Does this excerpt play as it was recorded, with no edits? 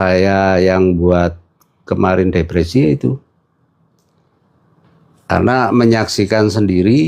yes; 0 cuts

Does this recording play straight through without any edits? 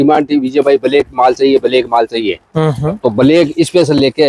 yes; 0 cuts

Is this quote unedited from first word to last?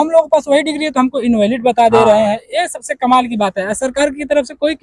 yes; 0 cuts

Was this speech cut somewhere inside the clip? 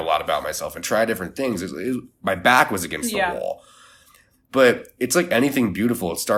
no; 0 cuts

